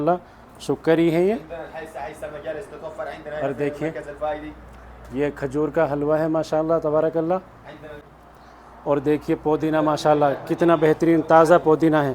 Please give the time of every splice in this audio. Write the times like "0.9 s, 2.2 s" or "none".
8.0 s